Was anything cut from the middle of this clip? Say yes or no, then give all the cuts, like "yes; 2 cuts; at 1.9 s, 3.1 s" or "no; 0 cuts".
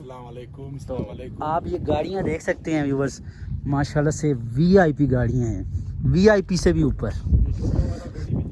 no; 0 cuts